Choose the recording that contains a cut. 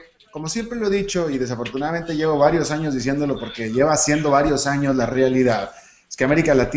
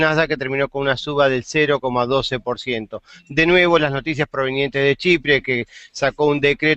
second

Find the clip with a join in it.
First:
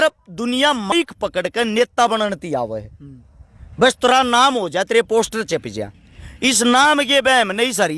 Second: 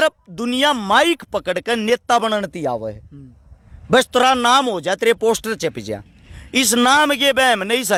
first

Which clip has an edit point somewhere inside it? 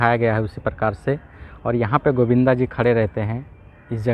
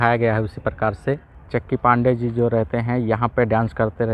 second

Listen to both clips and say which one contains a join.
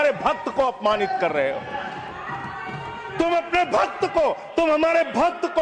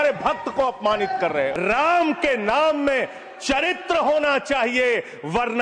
second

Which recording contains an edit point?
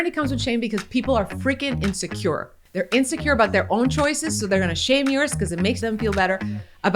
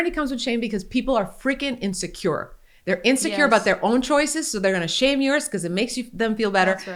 first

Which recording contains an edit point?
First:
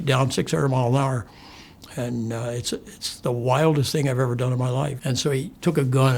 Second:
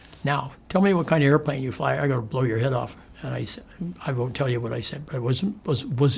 first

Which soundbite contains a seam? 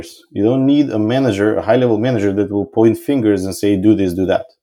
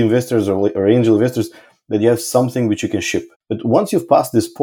second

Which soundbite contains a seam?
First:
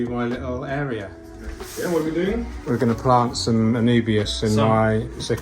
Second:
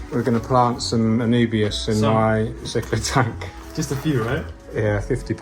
first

